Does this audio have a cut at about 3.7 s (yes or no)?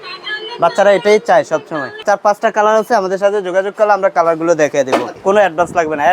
no